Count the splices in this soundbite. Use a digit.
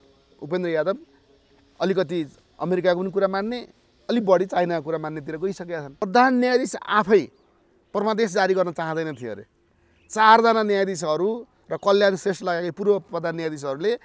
1